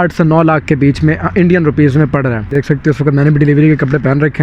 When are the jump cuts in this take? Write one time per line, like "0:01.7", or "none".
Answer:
0:02.5